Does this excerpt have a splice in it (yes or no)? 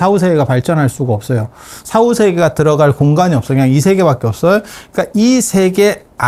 no